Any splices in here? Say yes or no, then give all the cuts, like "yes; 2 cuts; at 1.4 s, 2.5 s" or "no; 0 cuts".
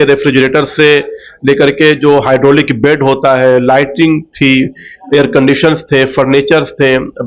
no; 0 cuts